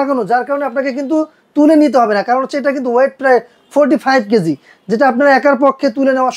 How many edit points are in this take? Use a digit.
0